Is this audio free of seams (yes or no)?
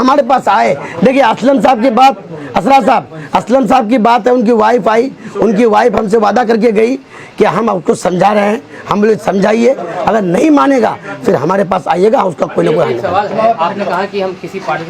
yes